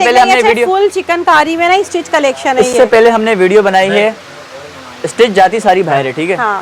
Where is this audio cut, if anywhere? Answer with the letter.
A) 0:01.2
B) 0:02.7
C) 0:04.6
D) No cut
D